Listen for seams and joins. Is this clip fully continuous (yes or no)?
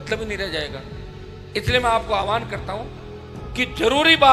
yes